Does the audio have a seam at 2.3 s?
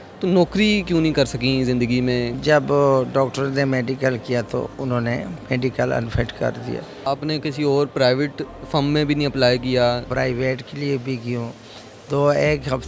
yes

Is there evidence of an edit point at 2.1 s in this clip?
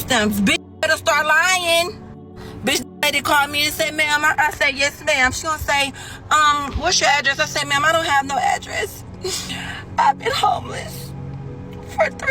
no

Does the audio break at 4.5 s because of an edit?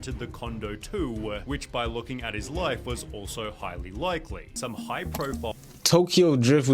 yes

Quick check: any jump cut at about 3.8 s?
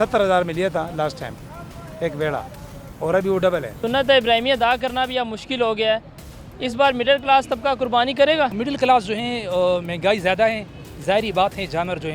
no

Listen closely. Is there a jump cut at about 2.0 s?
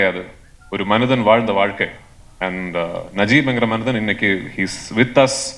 no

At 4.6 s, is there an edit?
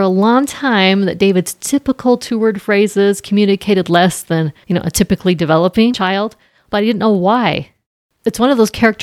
yes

